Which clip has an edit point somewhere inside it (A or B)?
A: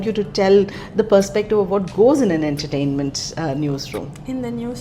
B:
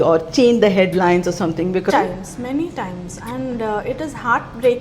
B